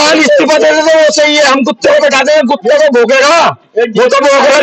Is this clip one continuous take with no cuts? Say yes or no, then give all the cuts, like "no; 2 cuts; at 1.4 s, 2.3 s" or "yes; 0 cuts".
yes; 0 cuts